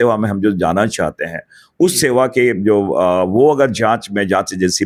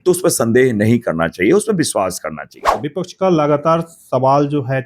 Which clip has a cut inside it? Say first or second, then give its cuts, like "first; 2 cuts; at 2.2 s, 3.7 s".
second; 1 cut; at 2.8 s